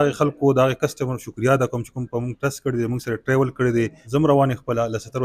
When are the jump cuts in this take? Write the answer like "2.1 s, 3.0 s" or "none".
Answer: 4.0 s